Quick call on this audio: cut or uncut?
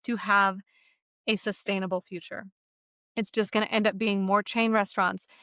uncut